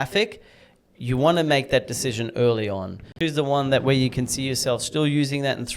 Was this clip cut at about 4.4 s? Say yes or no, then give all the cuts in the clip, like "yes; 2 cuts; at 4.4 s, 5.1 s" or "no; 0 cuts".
no; 1 cut; at 3.1 s